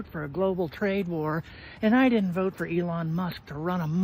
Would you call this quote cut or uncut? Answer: uncut